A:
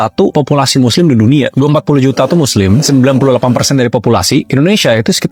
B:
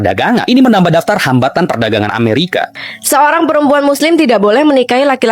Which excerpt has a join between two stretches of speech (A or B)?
B